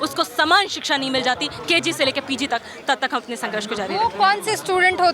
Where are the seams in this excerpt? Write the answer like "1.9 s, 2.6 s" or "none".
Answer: none